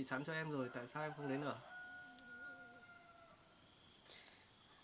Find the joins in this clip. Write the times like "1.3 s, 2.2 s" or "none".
none